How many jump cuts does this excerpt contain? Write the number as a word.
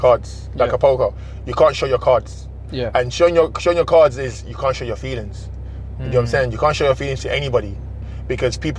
zero